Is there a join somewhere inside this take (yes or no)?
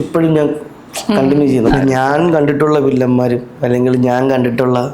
yes